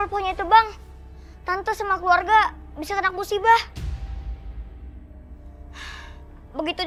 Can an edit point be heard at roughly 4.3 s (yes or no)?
no